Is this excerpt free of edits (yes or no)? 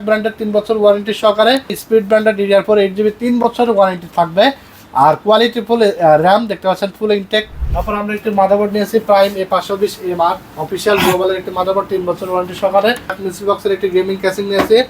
no